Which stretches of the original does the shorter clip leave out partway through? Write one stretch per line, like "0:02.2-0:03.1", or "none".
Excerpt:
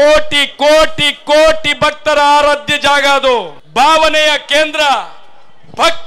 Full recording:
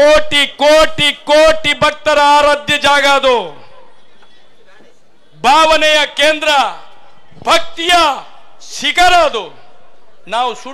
0:03.6-0:05.3